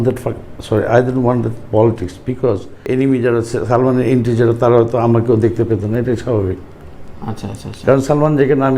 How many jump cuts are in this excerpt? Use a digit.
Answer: 1